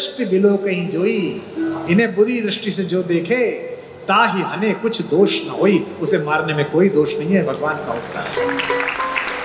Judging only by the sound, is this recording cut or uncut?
uncut